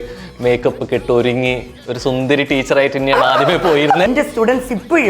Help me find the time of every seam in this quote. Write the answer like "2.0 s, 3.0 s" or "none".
4.1 s

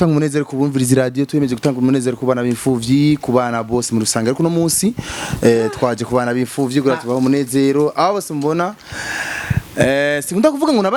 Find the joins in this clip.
none

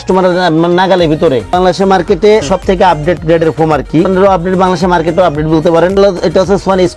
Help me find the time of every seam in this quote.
1.5 s, 2.5 s, 4.1 s, 6.0 s

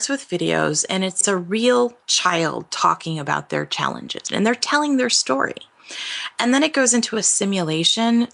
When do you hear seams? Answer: 1.2 s, 4.2 s

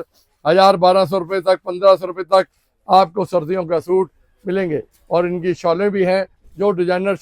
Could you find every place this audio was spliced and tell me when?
none

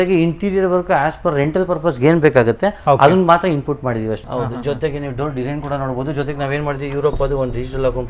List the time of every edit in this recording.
4.2 s

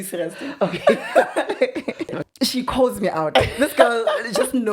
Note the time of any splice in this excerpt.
2.2 s

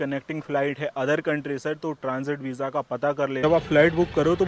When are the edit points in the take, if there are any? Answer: 3.4 s

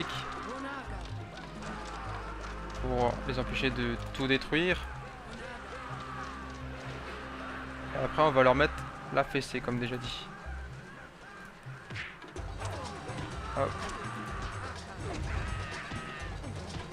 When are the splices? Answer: 13.4 s

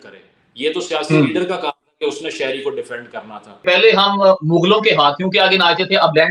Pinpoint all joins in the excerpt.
3.6 s

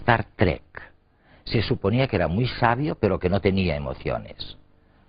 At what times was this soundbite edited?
1.6 s

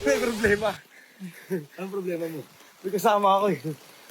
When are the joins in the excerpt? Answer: none

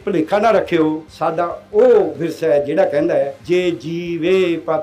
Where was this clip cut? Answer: 1.1 s, 3.4 s

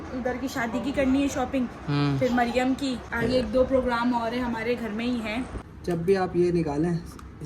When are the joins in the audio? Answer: 3.1 s, 5.6 s

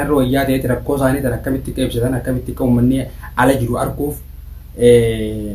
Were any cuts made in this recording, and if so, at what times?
none

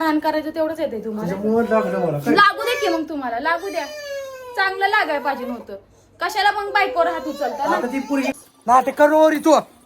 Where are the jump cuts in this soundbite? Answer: 8.3 s

